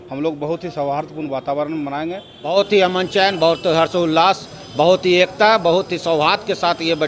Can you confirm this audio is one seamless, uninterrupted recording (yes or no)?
no